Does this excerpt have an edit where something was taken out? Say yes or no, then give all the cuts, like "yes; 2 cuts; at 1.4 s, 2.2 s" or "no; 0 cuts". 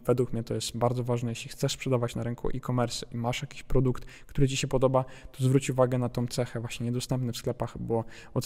no; 0 cuts